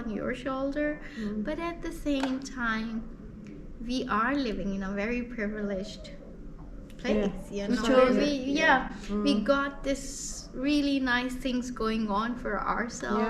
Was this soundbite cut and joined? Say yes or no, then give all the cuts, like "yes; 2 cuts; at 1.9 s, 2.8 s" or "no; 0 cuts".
no; 0 cuts